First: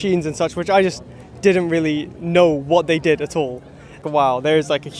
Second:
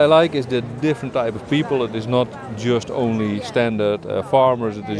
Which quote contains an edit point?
first; 1 cut; at 4.0 s

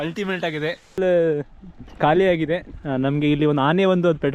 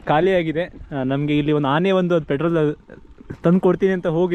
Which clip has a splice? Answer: first; 1 cut; at 1.0 s

